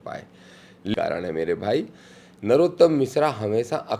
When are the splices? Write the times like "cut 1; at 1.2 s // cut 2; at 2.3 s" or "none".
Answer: cut 1; at 0.9 s